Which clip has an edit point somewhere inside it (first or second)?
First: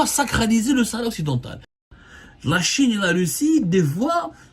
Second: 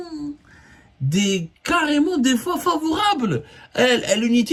first